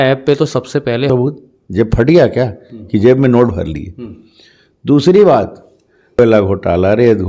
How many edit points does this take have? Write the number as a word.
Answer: two